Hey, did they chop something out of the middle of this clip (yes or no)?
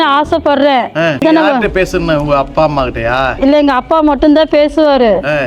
no